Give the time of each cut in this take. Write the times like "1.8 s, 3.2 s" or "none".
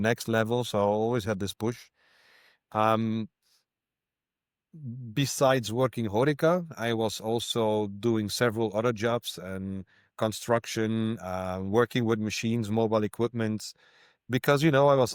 none

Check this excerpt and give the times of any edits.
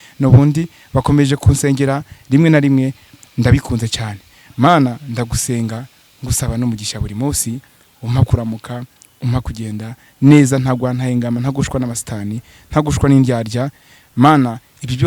none

